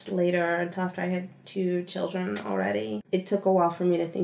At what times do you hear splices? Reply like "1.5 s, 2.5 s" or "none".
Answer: 2.9 s